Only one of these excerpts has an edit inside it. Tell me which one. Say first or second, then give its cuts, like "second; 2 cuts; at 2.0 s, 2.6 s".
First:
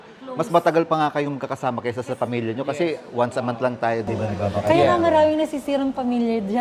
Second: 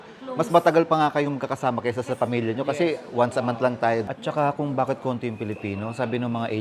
second; 1 cut; at 4.0 s